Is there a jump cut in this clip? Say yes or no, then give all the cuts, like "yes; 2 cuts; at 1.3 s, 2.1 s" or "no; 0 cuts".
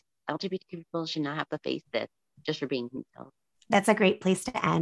no; 0 cuts